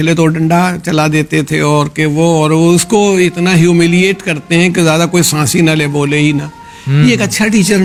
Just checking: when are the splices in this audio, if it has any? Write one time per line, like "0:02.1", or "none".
none